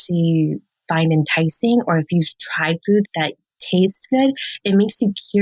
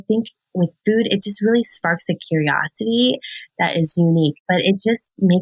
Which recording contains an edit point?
second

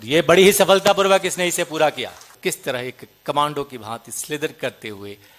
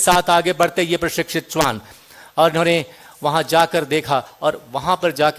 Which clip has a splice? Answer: first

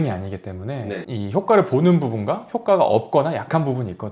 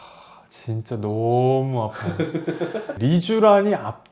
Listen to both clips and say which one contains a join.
second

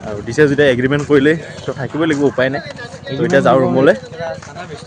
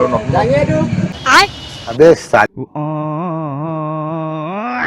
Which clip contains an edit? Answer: second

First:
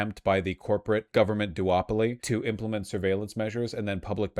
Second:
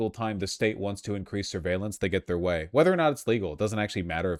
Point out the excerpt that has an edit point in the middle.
first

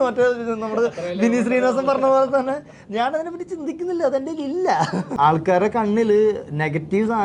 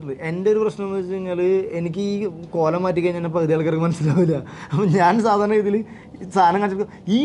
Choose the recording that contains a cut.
first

